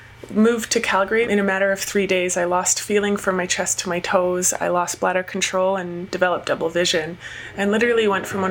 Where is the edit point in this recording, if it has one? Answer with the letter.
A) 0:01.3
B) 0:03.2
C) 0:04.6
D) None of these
A